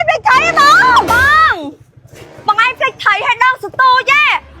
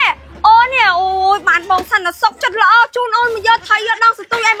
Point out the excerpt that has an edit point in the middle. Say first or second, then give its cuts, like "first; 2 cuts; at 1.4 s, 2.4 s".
first; 1 cut; at 1.1 s